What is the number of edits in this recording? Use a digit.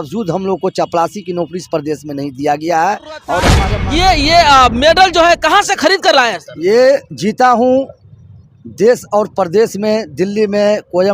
1